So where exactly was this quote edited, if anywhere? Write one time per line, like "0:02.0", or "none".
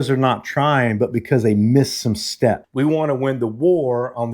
0:02.6